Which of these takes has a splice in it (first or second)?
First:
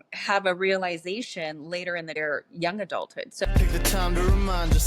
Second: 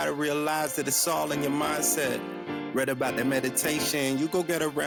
first